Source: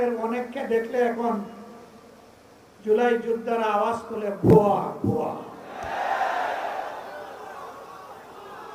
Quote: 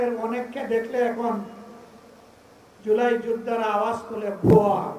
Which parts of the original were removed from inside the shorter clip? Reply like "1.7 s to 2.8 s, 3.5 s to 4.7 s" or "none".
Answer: none